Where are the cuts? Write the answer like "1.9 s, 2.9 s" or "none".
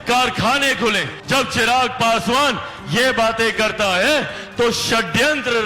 1.1 s